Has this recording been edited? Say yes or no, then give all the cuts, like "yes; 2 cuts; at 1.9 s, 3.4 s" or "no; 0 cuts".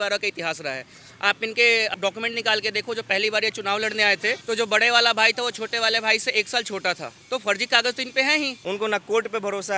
yes; 4 cuts; at 1.9 s, 4.4 s, 7.1 s, 8.6 s